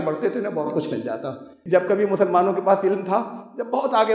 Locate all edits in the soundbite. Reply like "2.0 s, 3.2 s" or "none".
1.5 s